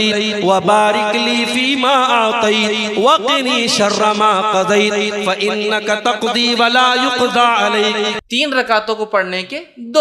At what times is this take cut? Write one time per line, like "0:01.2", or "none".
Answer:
0:08.3